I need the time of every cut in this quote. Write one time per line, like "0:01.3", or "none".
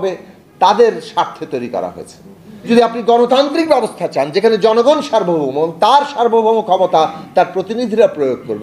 0:02.7

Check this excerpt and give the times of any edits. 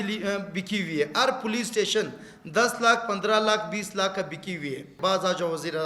0:04.9

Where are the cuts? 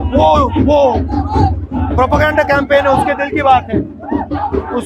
none

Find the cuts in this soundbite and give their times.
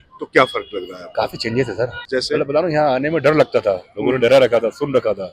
0:02.0

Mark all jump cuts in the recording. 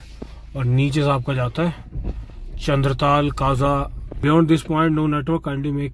0:04.0

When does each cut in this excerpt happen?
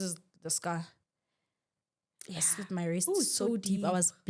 none

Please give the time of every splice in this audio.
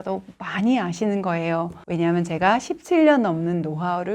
0:01.8

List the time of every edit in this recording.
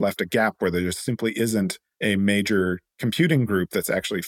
0:01.8
0:02.9

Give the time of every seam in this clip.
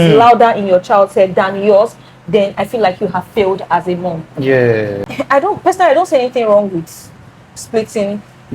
0:05.0

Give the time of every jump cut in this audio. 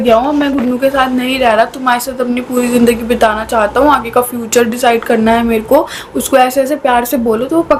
none

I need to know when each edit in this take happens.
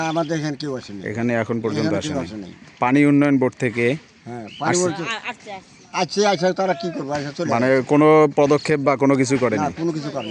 none

